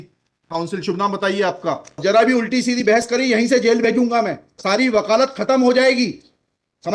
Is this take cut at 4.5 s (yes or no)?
yes